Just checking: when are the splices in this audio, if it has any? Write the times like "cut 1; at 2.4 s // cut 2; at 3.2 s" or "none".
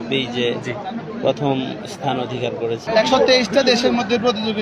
cut 1; at 2.8 s